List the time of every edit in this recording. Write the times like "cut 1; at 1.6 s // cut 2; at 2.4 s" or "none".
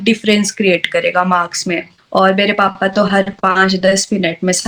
cut 1; at 1.9 s